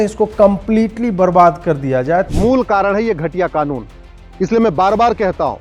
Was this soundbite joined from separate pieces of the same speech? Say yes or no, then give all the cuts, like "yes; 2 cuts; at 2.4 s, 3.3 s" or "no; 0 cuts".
yes; 1 cut; at 2.3 s